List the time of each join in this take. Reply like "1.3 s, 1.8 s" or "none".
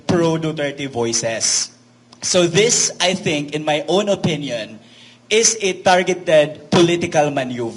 none